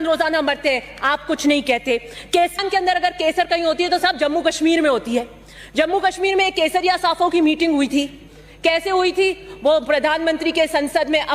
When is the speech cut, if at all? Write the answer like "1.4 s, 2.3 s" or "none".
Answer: 2.6 s